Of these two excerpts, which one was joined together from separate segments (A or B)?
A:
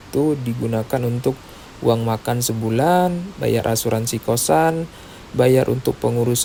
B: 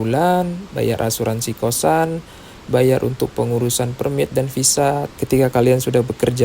B